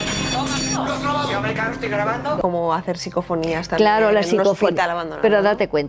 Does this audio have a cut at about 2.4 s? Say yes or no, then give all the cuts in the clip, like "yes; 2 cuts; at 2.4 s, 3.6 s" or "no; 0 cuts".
yes; 1 cut; at 2.4 s